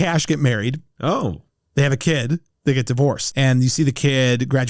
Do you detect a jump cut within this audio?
yes; 1 cut; at 3.3 s

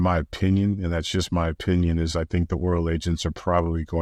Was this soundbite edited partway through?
no; 0 cuts

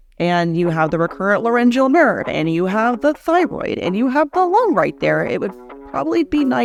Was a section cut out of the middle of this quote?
no; 0 cuts

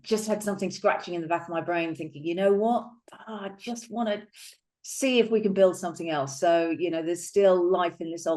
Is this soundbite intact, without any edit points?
yes; 0 cuts

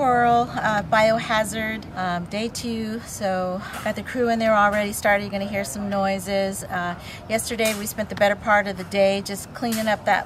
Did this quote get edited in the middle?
no; 0 cuts

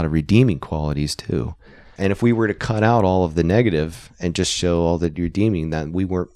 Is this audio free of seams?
no; 1 cut; at 1.6 s

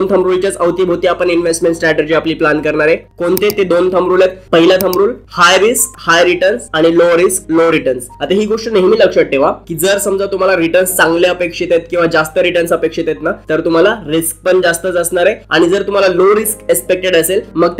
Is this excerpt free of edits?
yes; 0 cuts

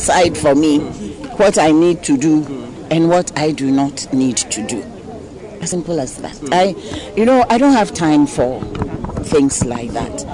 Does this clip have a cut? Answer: no; 0 cuts

